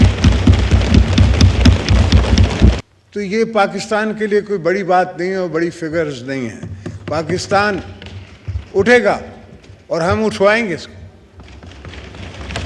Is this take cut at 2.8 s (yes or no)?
yes